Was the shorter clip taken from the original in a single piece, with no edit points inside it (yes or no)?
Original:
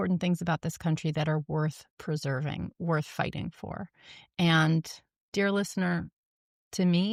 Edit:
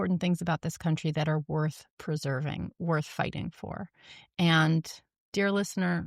yes